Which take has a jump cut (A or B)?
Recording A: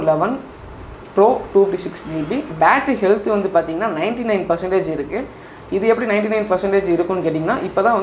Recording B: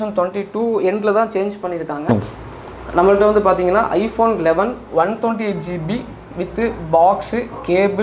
B